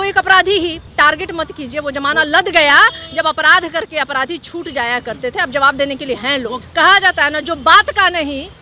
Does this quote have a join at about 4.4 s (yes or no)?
no